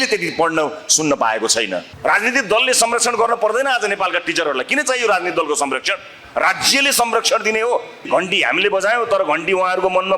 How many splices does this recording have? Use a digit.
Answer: 2